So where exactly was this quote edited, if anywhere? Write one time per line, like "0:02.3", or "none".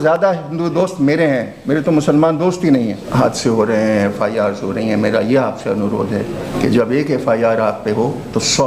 0:03.0
0:06.4